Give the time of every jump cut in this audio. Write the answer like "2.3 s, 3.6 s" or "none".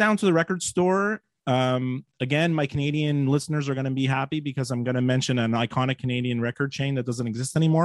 none